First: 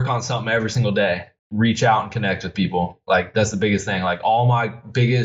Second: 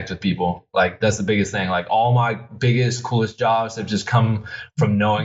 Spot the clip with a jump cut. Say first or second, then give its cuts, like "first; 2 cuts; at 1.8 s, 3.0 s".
first; 1 cut; at 1.3 s